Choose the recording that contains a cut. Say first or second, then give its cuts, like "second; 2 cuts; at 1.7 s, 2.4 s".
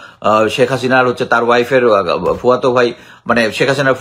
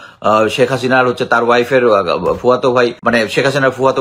second; 1 cut; at 3.0 s